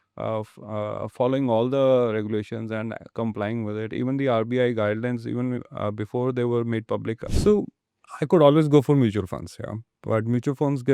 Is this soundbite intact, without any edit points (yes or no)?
no